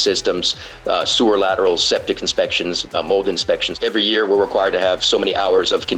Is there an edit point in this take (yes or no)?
yes